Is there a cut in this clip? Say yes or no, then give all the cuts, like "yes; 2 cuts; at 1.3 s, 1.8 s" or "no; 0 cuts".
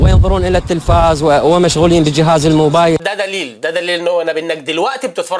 no; 0 cuts